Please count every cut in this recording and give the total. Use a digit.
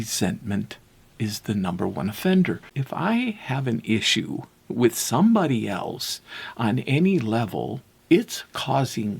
2